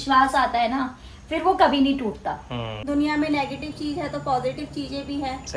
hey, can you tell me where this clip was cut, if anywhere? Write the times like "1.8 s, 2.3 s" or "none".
2.8 s